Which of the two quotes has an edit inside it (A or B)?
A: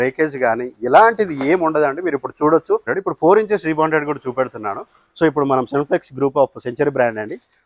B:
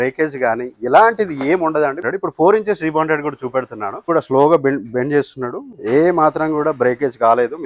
B